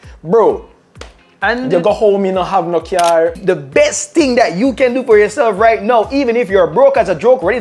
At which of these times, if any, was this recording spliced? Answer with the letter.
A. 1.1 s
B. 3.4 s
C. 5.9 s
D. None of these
B